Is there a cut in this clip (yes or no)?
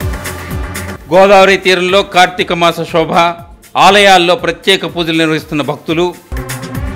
yes